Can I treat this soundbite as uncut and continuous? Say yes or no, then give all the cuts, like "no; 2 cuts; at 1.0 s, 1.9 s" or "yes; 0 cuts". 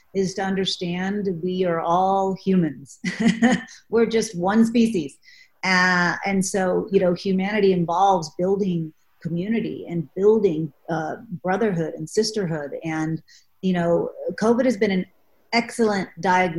yes; 0 cuts